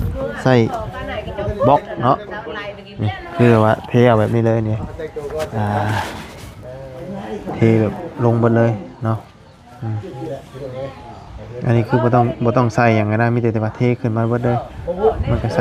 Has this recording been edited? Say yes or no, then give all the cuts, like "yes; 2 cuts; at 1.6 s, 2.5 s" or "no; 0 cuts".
no; 0 cuts